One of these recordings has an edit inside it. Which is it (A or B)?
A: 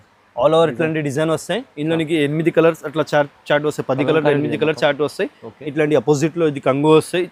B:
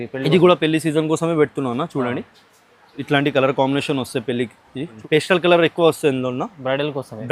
B